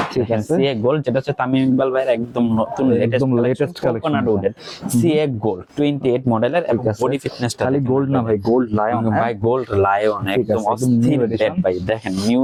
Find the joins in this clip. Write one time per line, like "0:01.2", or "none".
none